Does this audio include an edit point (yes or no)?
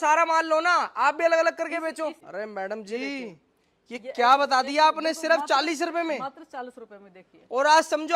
yes